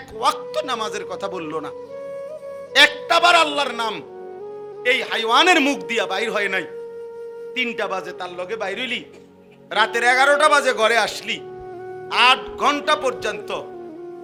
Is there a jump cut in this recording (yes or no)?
no